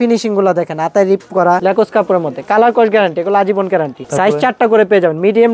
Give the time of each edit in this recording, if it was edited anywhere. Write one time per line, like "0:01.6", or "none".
0:01.6
0:04.0